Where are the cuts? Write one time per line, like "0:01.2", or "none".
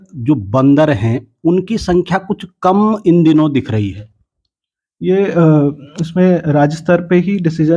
none